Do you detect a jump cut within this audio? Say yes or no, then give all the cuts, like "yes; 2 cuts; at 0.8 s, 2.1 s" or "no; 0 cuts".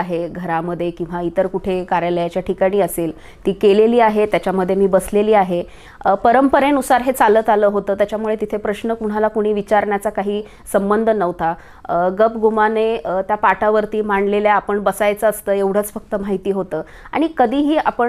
no; 0 cuts